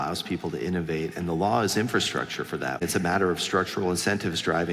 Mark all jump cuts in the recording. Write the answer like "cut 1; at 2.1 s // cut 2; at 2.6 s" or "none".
cut 1; at 2.8 s